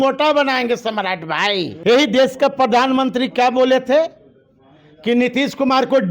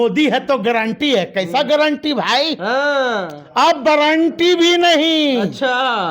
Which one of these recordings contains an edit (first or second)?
first